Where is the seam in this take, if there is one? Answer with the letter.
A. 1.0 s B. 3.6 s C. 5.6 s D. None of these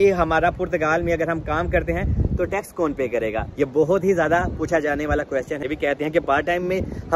C